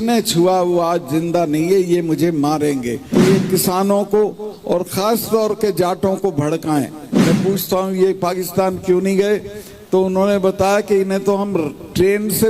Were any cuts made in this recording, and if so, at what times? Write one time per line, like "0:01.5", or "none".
0:03.1
0:07.1